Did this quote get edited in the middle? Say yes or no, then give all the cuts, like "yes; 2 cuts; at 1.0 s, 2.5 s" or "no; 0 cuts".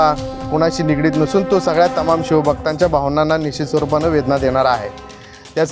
no; 0 cuts